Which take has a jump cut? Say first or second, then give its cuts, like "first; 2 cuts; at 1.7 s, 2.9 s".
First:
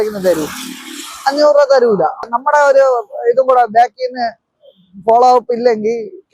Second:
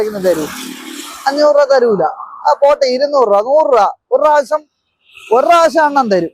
first; 1 cut; at 2.3 s